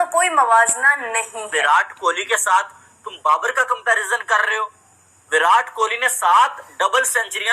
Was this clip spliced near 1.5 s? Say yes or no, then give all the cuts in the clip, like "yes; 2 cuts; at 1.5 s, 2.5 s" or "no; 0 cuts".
yes; 1 cut; at 1.5 s